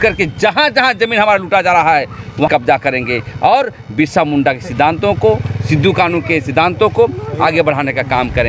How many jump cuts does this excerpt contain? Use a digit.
1